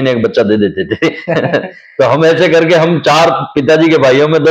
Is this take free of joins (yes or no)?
yes